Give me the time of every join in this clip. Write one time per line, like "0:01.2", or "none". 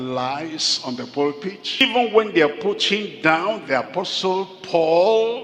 0:01.8